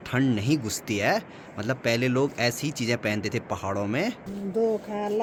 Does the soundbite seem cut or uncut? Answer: uncut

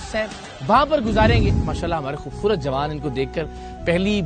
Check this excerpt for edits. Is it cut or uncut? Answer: cut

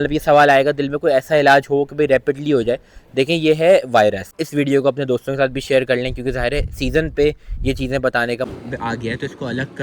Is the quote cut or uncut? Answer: cut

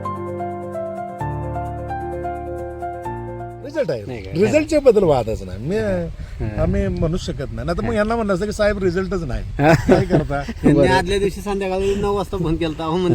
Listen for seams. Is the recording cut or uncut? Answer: cut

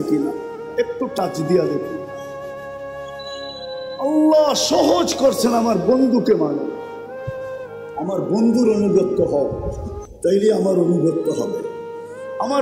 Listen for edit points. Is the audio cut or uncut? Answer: cut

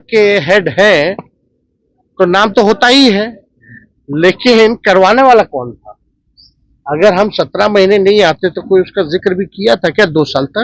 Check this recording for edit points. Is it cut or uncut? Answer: uncut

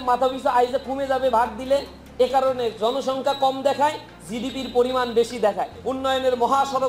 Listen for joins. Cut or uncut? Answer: cut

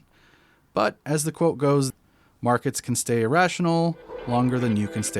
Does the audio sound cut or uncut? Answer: cut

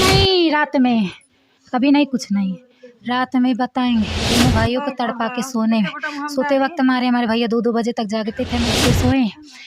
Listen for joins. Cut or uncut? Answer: cut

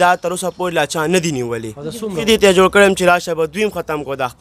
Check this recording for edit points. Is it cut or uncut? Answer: cut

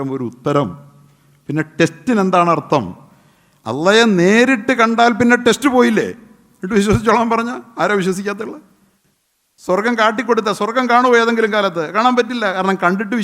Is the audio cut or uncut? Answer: uncut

